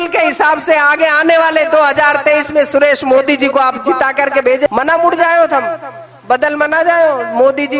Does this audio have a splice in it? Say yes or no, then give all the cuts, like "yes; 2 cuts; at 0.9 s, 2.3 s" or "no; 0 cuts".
yes; 1 cut; at 4.7 s